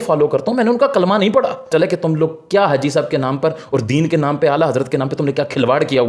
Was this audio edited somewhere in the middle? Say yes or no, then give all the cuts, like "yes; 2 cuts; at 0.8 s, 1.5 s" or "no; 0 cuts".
yes; 1 cut; at 1.7 s